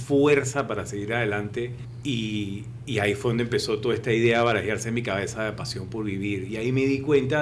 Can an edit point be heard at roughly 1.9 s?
yes; 1 cut; at 1.9 s

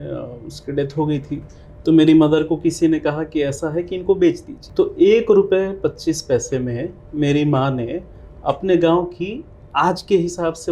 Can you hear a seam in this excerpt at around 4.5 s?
yes; 1 cut; at 4.5 s

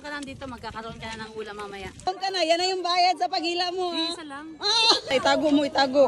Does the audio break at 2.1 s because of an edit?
yes; 2 cuts; at 2.1 s, 5.1 s

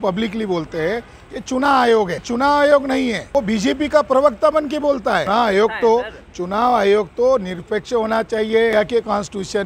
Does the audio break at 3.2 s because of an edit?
yes; 4 cuts; at 2.2 s, 3.2 s, 5.3 s, 8.7 s

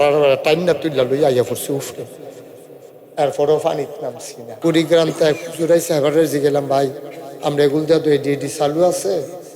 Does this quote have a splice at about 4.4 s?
yes; 1 cut; at 4.4 s

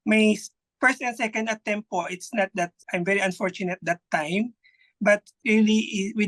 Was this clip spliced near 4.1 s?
no; 1 cut; at 5.3 s

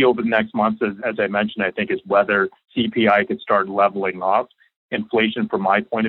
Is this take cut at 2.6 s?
yes; 2 cuts; at 1.0 s, 2.6 s

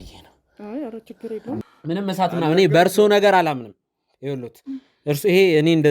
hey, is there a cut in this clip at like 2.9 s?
no; 1 cut; at 1.6 s

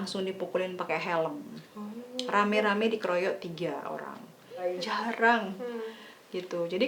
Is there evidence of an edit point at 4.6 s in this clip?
yes; 1 cut; at 4.6 s

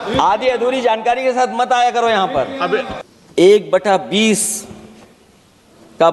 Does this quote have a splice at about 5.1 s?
no; 1 cut; at 3.0 s

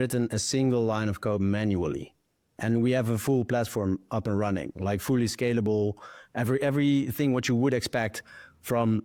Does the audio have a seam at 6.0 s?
no; 0 cuts

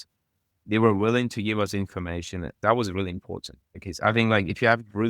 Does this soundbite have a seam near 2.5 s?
yes; 1 cut; at 2.5 s

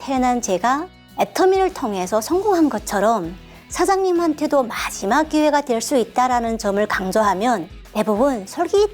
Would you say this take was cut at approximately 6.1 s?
no; 2 cuts; at 1.0 s, 7.8 s

